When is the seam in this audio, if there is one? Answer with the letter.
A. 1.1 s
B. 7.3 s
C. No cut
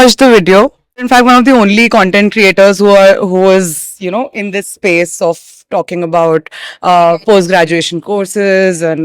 A